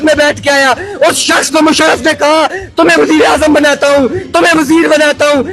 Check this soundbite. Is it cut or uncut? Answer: uncut